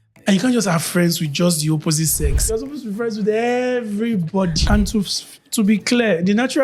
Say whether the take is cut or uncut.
cut